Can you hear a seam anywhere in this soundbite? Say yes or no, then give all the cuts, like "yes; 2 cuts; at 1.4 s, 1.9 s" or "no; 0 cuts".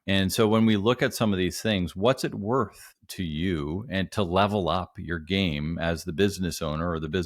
no; 0 cuts